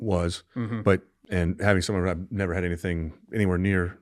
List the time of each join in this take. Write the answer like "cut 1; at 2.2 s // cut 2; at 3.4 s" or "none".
cut 1; at 1.2 s